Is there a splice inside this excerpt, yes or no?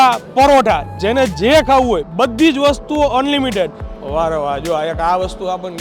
yes